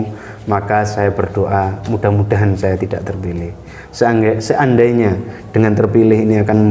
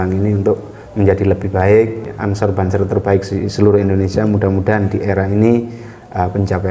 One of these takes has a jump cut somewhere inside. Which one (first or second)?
second